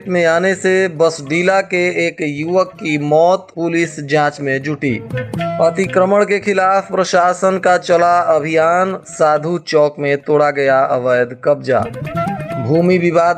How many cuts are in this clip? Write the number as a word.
zero